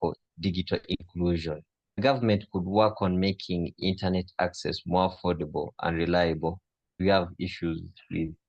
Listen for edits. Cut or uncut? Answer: cut